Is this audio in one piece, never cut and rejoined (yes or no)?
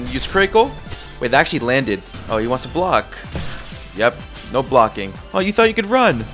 no